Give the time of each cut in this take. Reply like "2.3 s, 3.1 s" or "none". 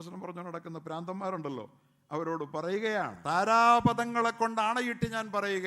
3.2 s